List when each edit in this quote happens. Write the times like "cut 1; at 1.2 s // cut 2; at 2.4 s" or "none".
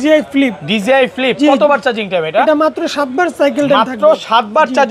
none